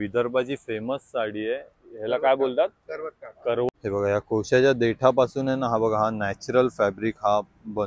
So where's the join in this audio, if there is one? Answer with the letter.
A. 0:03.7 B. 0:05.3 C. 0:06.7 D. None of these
A